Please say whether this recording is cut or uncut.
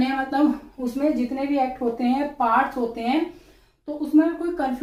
uncut